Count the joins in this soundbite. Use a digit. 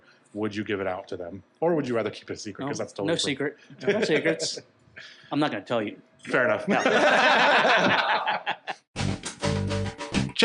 1